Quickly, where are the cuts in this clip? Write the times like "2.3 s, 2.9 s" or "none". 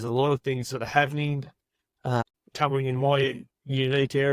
2.2 s